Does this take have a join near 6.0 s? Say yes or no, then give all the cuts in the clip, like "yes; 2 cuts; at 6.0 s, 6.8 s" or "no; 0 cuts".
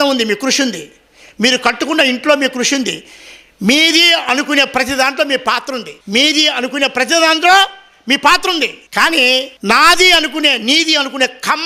no; 0 cuts